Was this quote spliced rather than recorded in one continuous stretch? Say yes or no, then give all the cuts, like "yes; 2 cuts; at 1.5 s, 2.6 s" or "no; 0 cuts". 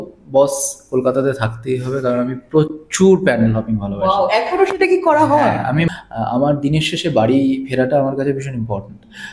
yes; 1 cut; at 5.9 s